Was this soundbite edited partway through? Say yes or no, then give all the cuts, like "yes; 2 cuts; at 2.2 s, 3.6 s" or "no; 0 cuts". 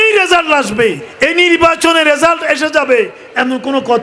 yes; 1 cut; at 1.1 s